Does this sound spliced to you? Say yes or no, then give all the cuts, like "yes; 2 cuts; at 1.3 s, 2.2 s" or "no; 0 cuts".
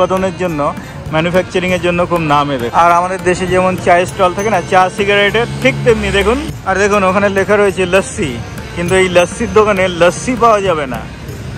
yes; 2 cuts; at 2.7 s, 6.5 s